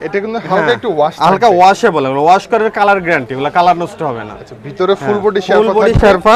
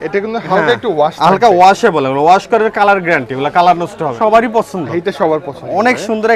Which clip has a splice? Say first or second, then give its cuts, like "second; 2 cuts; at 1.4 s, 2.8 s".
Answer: second; 1 cut; at 4.1 s